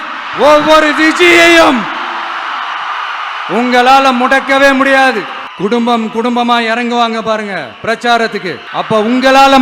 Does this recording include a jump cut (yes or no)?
yes